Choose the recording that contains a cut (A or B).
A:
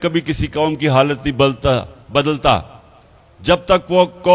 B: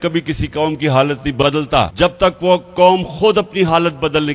B